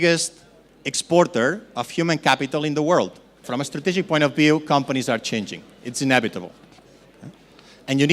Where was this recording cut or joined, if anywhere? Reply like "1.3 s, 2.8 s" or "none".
3.5 s